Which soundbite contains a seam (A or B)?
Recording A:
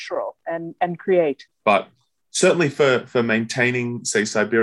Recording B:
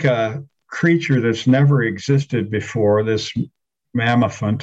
A